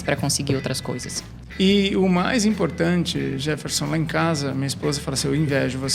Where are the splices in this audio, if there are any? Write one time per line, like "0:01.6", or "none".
0:01.4